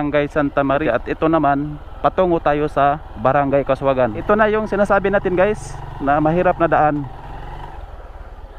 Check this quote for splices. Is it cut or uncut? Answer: cut